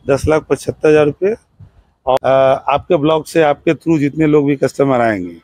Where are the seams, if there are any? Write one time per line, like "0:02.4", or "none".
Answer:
0:02.2